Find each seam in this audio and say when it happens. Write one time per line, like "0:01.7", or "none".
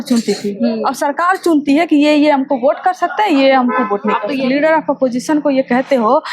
0:04.4